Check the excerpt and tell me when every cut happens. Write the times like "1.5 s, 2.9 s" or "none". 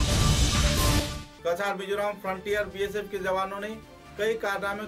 1.0 s